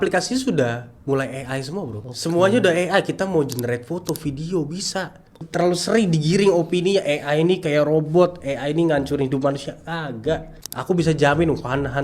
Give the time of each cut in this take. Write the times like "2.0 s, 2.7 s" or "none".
5.4 s